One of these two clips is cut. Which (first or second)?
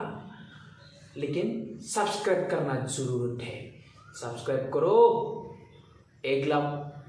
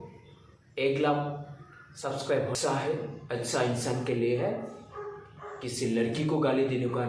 second